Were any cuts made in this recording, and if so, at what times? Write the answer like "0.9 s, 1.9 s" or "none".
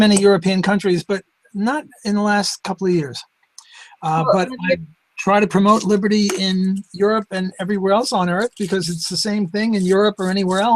3.7 s